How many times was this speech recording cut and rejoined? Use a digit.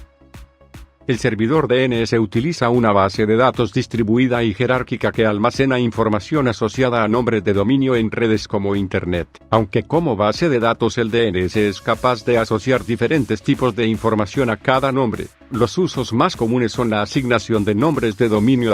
1